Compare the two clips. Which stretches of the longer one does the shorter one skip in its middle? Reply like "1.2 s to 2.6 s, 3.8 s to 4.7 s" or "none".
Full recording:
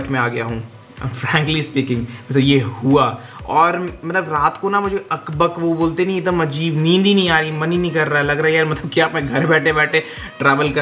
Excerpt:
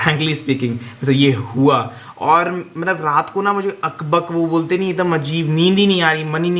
none